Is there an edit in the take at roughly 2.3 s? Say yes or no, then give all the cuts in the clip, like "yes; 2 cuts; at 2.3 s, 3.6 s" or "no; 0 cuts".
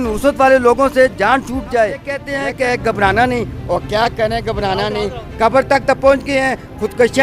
yes; 1 cut; at 2.3 s